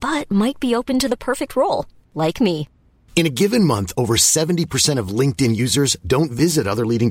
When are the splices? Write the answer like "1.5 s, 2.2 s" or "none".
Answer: none